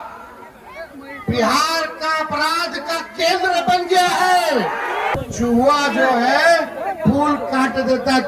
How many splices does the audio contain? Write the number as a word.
one